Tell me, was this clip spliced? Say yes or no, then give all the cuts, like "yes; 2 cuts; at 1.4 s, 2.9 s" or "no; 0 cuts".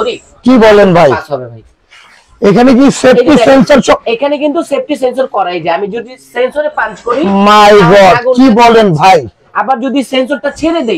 no; 0 cuts